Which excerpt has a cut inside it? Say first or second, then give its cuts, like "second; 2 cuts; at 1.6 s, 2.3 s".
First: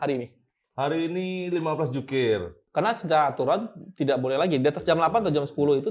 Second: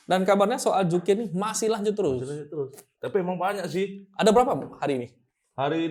first; 1 cut; at 2.6 s